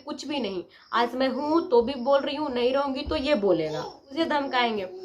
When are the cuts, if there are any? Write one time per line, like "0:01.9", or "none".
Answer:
0:04.1